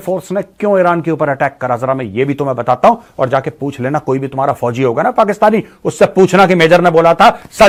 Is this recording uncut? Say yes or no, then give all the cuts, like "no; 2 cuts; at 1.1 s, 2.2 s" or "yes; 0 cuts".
yes; 0 cuts